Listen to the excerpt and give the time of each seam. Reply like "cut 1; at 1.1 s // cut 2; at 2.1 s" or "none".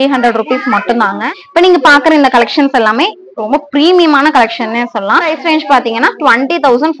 cut 1; at 1.2 s // cut 2; at 5.3 s